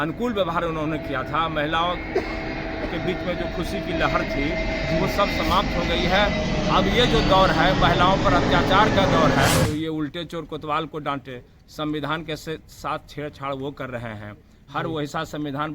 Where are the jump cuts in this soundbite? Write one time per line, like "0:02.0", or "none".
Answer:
0:09.7